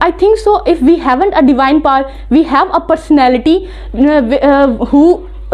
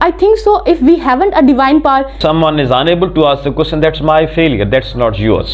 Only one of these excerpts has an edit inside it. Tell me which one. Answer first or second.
second